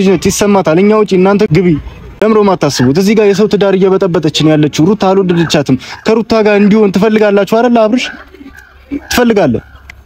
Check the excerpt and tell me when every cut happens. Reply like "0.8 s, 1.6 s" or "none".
1.5 s